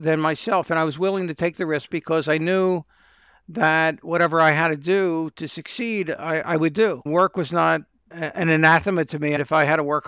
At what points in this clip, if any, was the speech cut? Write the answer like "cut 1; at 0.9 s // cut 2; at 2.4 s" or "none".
cut 1; at 7.1 s